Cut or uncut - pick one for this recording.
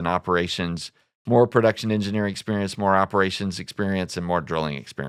uncut